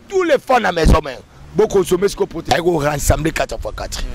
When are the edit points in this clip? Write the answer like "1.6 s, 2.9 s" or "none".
2.4 s